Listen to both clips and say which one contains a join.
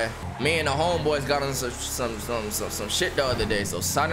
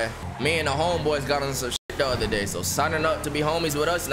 second; 1 cut; at 1.9 s

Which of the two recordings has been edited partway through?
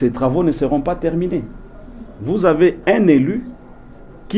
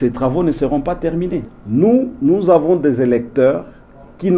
second; 1 cut; at 1.5 s

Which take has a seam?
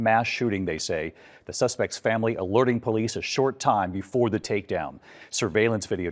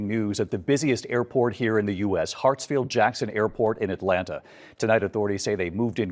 first; 1 cut; at 4.8 s

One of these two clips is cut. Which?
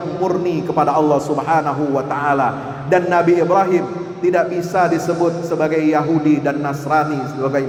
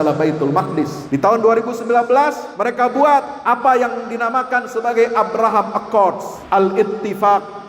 second; 4 cuts; at 1.0 s, 2.5 s, 3.3 s, 6.3 s

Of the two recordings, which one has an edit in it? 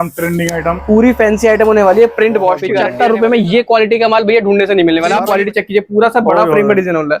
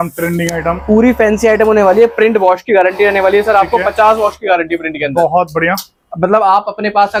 first; 2 cuts; at 2.8 s, 5.2 s

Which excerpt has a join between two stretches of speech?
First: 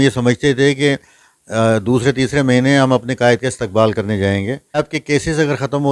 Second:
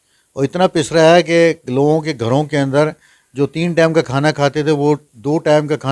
first; 1 cut; at 4.9 s

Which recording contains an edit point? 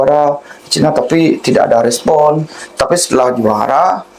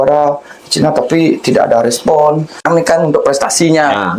second; 1 cut; at 2.6 s

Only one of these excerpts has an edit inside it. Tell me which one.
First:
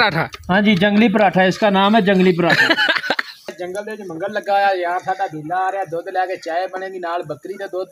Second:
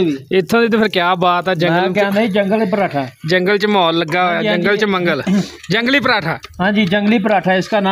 first; 1 cut; at 3.4 s

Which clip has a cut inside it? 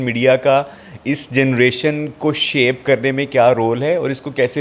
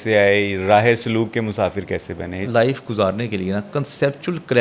second; 1 cut; at 2.5 s

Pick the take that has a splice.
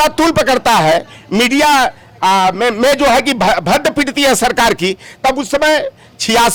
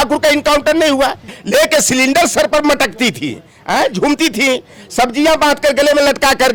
second; 1 cut; at 1.4 s

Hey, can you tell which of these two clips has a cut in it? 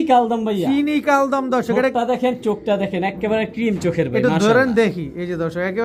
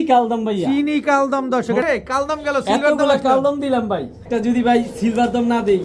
second; 2 cuts; at 1.8 s, 4.2 s

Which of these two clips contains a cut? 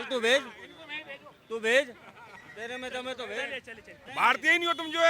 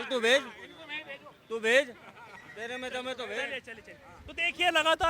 first; 1 cut; at 4.0 s

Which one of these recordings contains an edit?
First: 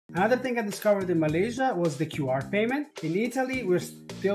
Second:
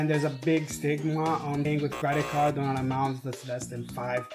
second; 1 cut; at 1.5 s

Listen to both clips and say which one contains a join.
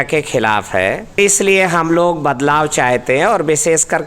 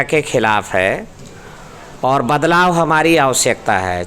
first; 1 cut; at 1.2 s

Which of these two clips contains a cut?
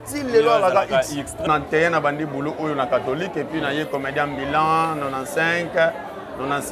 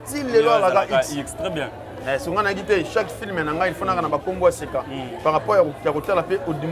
first; 1 cut; at 1.5 s

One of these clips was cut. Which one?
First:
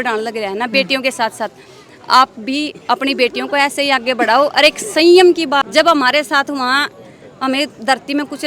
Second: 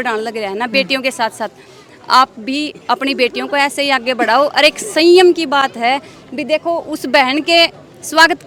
first; 1 cut; at 5.7 s

